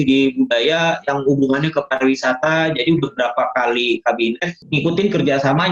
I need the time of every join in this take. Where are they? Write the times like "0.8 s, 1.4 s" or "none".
4.5 s